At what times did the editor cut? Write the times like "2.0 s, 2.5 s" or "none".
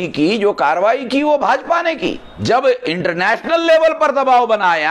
2.3 s